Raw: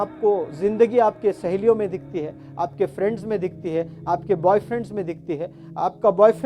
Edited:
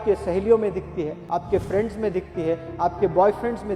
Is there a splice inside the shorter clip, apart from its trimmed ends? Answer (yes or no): yes